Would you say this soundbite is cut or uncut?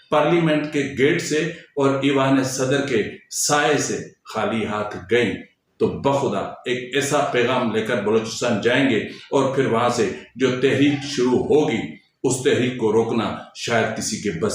uncut